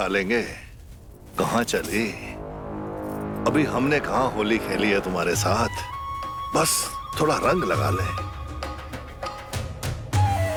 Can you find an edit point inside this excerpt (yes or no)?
no